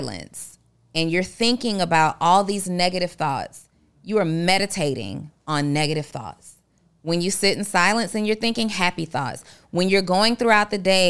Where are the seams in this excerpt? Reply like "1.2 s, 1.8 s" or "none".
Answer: none